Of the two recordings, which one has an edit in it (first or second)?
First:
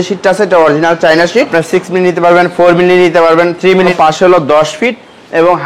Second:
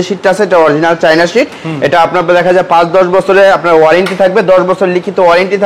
first